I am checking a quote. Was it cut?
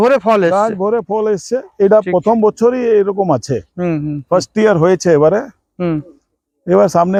no; 0 cuts

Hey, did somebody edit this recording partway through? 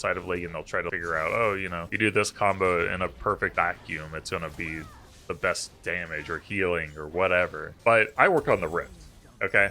yes; 4 cuts; at 0.9 s, 1.8 s, 3.5 s, 8.0 s

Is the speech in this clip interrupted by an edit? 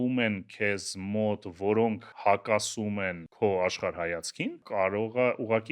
yes; 3 cuts; at 2.1 s, 3.2 s, 4.6 s

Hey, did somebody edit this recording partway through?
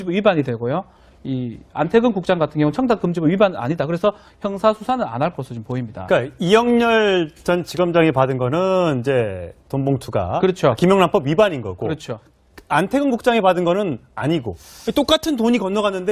yes; 1 cut; at 9.2 s

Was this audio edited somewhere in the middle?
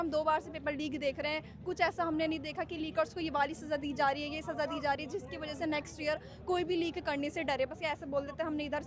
no; 0 cuts

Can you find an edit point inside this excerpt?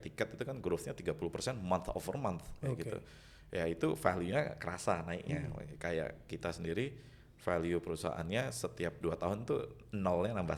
no; 0 cuts

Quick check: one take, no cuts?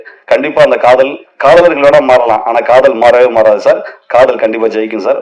yes; 0 cuts

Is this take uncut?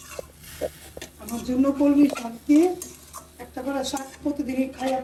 yes; 0 cuts

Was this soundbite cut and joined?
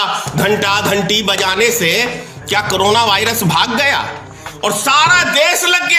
no; 0 cuts

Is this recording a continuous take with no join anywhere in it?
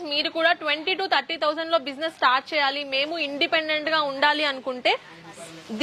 yes; 0 cuts

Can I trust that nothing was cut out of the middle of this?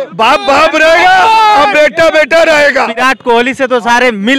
no; 1 cut; at 2.9 s

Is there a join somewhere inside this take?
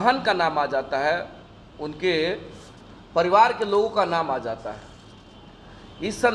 no; 0 cuts

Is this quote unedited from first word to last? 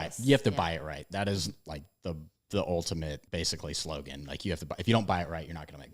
no; 2 cuts; at 2.3 s, 3.2 s

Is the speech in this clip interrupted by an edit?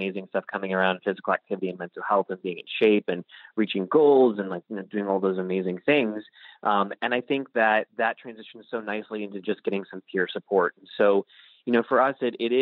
no; 0 cuts

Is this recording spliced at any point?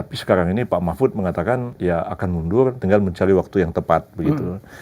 yes; 2 cuts; at 1.7 s, 2.8 s

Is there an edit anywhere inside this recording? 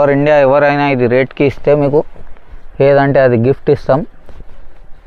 no; 0 cuts

